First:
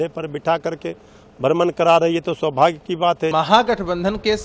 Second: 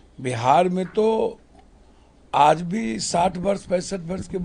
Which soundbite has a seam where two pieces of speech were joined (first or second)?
first